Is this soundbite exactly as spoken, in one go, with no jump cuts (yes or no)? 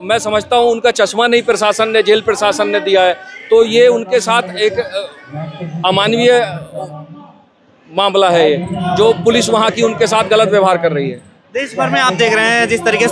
yes